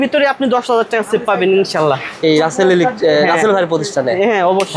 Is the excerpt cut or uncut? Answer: uncut